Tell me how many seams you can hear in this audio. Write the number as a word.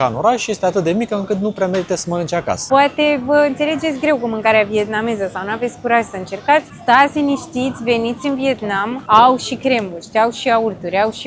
three